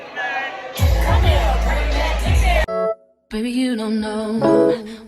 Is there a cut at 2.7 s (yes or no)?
yes